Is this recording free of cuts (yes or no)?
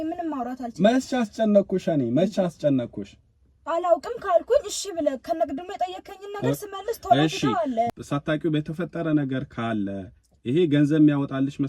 no